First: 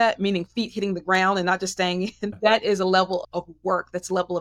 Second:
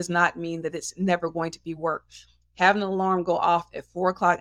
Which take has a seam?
first; 1 cut; at 2.3 s

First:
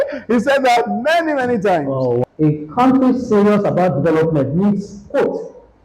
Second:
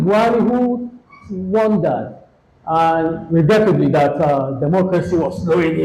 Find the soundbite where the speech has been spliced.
first; 1 cut; at 2.2 s

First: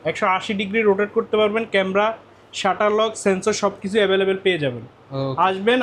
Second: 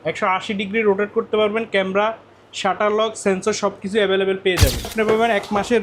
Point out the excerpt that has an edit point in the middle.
second; 1 cut; at 4.9 s

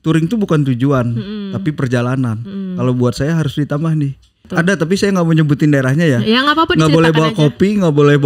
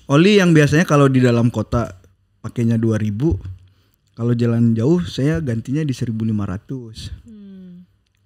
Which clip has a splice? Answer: first; 1 cut; at 4.4 s

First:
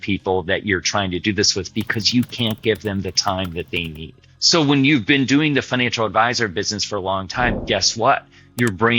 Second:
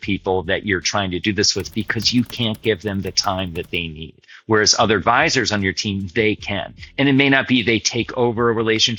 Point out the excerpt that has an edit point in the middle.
first; 1 cut; at 4.3 s

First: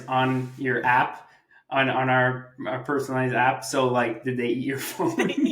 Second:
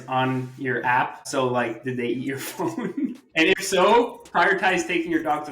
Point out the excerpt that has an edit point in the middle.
second; 2 cuts; at 1.2 s, 3.2 s

